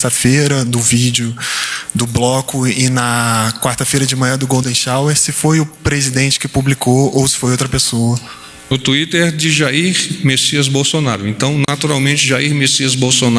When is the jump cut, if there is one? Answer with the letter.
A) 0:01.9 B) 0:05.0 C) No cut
C